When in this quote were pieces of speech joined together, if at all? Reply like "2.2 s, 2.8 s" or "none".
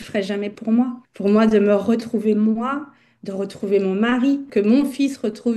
1.1 s, 4.5 s